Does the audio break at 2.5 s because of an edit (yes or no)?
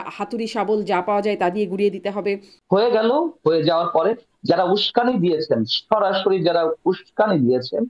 yes